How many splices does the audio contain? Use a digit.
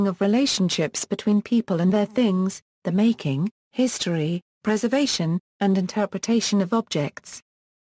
1